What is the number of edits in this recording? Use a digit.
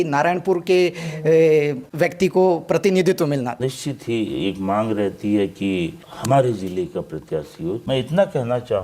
2